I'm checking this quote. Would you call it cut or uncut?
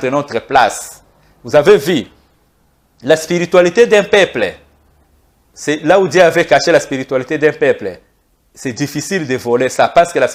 uncut